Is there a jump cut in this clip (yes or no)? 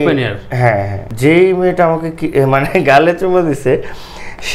yes